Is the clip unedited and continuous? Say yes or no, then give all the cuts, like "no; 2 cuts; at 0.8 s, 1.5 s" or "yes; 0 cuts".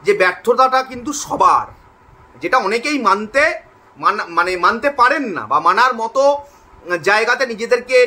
yes; 0 cuts